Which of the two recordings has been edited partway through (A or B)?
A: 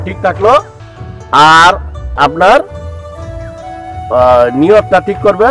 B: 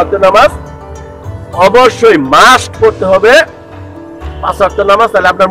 A